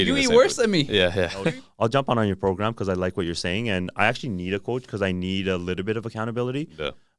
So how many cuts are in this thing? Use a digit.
1